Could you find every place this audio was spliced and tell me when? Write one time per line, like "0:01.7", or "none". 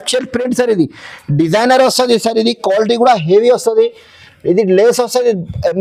none